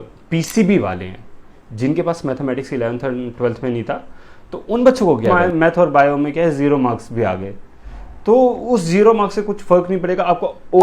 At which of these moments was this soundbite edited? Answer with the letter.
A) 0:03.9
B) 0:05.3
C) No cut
B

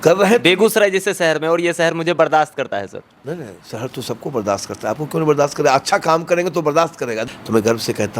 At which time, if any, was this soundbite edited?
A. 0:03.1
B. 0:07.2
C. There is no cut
B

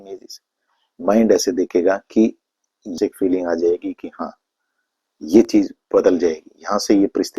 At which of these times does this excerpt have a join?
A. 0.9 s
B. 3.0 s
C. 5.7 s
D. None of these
B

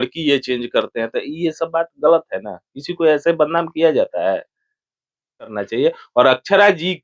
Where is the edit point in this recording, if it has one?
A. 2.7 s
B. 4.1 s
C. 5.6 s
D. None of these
C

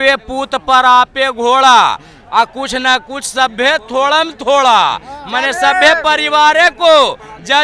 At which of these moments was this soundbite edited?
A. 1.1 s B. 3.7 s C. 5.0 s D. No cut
D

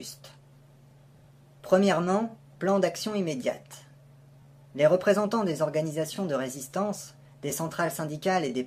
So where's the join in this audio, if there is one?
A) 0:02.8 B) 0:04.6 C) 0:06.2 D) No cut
D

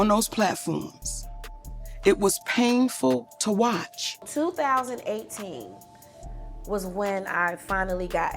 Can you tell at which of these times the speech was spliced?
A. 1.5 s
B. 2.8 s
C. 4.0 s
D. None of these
C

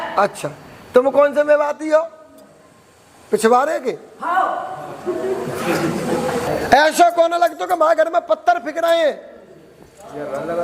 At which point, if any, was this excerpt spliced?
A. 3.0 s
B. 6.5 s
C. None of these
B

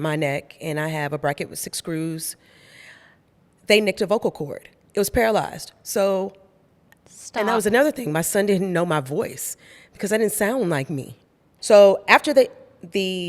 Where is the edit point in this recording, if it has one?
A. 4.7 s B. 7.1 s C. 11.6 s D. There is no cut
C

